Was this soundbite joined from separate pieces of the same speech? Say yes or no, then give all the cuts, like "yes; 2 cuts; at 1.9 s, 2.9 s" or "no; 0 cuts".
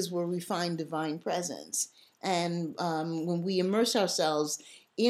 no; 0 cuts